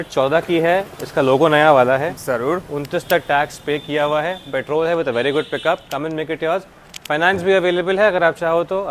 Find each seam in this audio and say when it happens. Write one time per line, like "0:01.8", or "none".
none